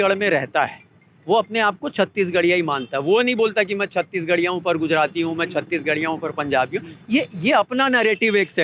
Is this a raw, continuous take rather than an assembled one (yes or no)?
yes